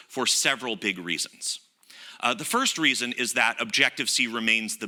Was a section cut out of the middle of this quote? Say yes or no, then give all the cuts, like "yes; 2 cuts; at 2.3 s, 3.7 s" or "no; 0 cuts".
no; 0 cuts